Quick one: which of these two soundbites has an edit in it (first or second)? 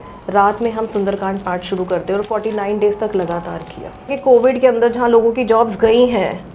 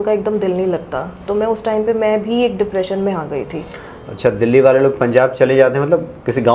first